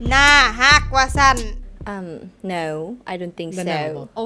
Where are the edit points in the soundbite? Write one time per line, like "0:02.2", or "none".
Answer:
0:01.5